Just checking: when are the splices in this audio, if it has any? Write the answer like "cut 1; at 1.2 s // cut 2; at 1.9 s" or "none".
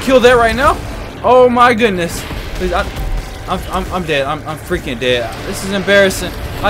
none